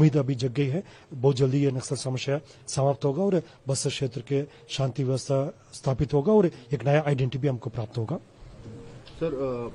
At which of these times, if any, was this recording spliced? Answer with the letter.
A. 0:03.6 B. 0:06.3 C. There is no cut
C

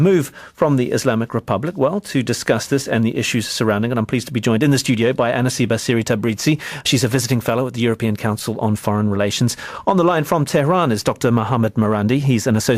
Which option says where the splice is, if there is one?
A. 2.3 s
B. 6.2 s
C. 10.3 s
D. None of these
B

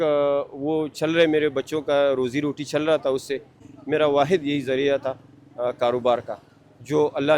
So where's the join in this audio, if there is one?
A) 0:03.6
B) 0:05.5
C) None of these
A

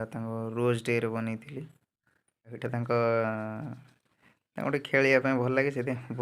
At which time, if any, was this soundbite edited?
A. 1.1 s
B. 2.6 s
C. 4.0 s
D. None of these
B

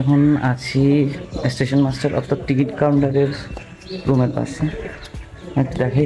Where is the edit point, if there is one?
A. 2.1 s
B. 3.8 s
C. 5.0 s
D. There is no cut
D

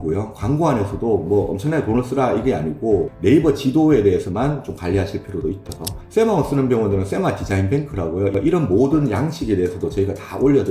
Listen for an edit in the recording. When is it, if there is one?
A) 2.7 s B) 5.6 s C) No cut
B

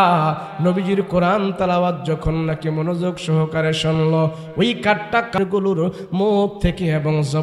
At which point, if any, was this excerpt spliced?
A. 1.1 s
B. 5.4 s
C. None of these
B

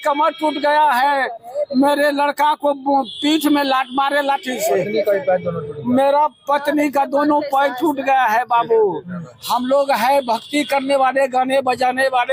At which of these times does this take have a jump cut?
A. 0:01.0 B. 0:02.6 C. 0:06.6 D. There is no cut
D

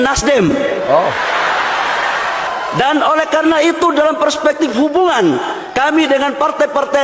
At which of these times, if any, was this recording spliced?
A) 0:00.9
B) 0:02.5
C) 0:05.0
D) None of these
B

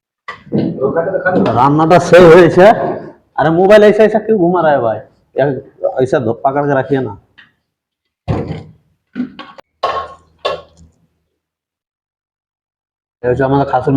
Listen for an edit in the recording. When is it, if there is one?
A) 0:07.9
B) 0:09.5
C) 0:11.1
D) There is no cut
B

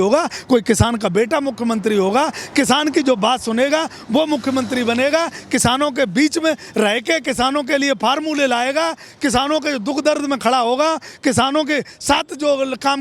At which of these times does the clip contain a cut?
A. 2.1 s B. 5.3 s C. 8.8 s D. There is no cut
D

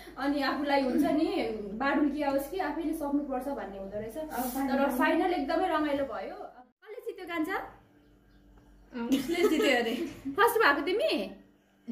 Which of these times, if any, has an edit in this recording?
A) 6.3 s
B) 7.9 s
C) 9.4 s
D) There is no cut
A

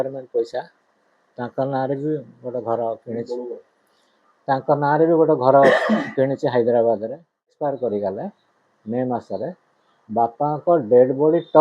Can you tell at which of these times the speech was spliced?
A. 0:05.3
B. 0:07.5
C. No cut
B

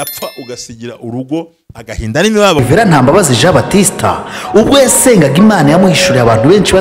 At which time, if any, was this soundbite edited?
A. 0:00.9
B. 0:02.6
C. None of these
B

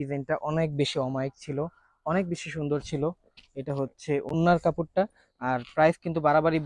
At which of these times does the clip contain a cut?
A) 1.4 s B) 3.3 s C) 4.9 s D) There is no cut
D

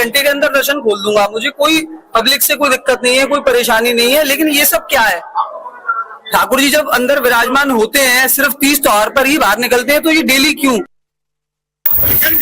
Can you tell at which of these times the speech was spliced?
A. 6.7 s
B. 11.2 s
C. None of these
A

